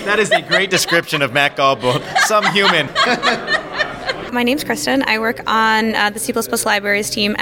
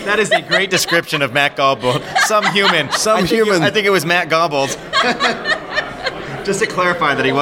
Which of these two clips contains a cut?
first; 2 cuts; at 2.9 s, 4.3 s

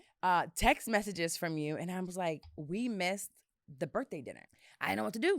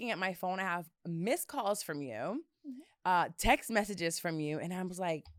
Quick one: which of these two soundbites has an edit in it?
first; 1 cut; at 4.4 s

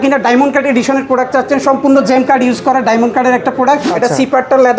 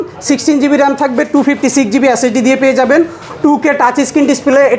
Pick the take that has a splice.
first; 1 cut; at 3.9 s

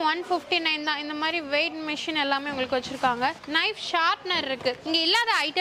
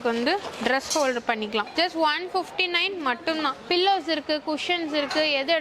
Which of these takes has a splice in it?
second; 1 cut; at 3.6 s

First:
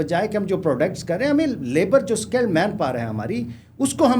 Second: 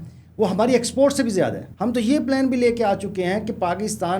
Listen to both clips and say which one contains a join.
second; 1 cut; at 1.7 s

